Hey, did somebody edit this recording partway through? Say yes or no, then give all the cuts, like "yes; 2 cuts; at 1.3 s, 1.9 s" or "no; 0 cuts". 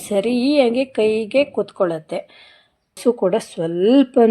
yes; 1 cut; at 3.0 s